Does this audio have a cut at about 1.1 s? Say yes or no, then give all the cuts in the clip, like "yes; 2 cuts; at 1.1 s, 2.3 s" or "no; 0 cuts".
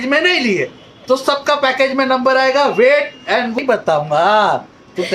no; 1 cut; at 3.6 s